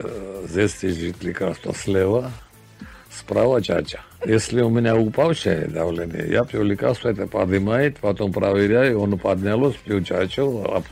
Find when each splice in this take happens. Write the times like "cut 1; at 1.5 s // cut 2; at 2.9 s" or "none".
cut 1; at 4.1 s